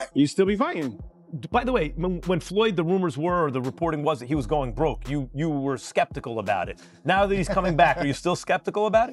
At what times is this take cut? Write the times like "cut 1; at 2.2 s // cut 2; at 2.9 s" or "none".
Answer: cut 1; at 1.0 s